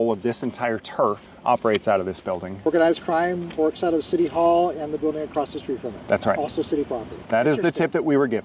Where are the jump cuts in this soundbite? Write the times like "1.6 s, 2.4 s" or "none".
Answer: 2.6 s, 7.2 s